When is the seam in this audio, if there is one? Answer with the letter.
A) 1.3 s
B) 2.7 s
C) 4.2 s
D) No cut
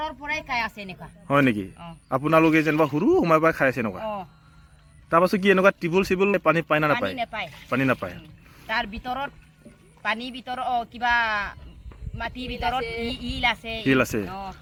D